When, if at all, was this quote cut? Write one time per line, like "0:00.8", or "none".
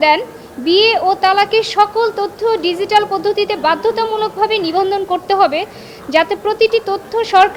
none